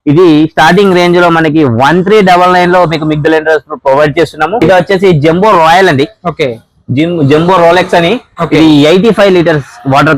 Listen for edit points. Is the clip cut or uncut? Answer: cut